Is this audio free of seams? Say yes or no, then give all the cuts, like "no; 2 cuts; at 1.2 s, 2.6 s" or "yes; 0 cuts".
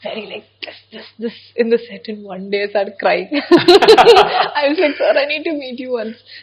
yes; 0 cuts